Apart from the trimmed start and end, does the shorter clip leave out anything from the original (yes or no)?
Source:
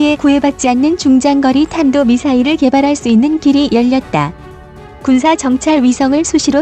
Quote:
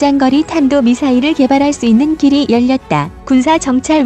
yes